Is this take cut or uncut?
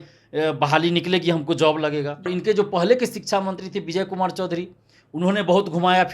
cut